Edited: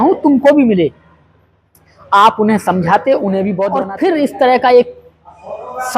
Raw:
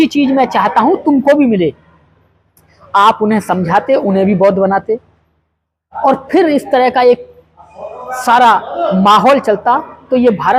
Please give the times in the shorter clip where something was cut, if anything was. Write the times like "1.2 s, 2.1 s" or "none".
3.7 s